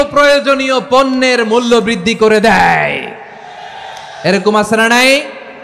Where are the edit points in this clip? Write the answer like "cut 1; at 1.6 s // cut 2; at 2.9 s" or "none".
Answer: none